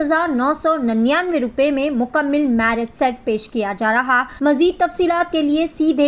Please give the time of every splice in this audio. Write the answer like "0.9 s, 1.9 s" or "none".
4.3 s

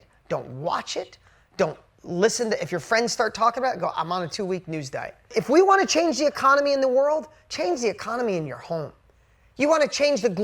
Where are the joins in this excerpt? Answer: 5.3 s

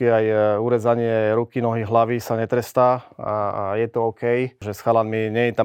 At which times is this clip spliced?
4.7 s

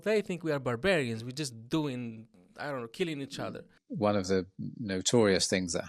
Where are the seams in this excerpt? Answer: 3.8 s

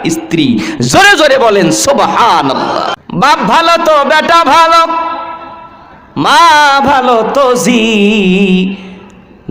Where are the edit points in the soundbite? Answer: 2.9 s

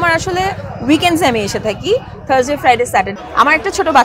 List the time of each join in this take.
3.1 s

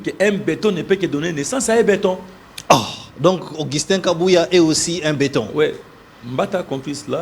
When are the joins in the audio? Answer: none

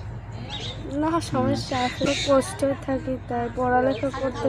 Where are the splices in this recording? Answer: 2.1 s

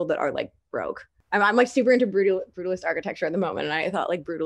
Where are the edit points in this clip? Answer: 1.2 s

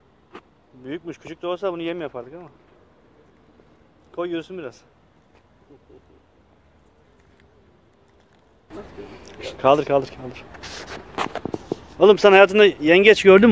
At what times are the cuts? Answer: 8.7 s

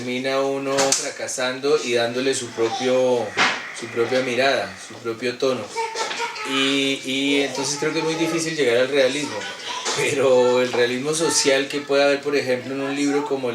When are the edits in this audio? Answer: none

